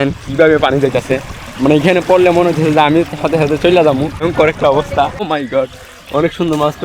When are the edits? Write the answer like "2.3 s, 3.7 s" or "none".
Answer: 4.2 s, 5.2 s